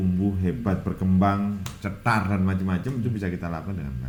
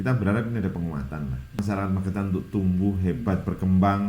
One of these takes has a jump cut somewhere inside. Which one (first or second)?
second